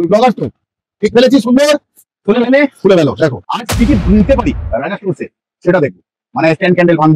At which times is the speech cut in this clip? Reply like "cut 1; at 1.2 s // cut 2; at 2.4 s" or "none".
cut 1; at 3.5 s